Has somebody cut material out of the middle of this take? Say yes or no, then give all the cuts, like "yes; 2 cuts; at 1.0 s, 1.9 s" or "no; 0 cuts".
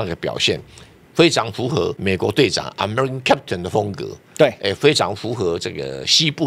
yes; 1 cut; at 2.0 s